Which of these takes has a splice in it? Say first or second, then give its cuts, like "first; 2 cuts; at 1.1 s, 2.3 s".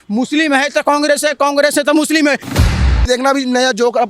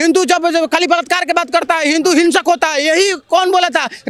first; 1 cut; at 2.7 s